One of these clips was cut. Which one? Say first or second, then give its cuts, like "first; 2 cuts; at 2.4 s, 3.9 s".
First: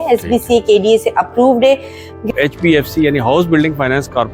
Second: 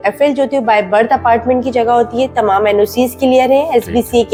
first; 1 cut; at 2.3 s